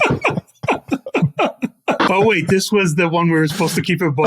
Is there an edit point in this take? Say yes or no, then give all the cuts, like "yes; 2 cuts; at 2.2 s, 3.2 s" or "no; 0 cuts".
yes; 1 cut; at 2.0 s